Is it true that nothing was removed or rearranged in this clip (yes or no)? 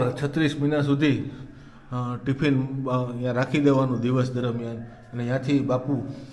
yes